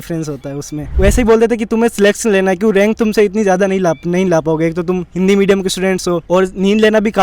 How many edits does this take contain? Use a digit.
2